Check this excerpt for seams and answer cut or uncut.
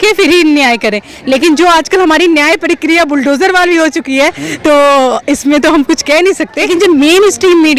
cut